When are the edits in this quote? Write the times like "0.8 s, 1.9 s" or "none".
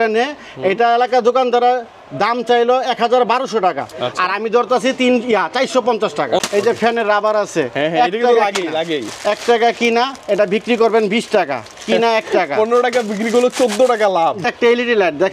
6.4 s, 14.5 s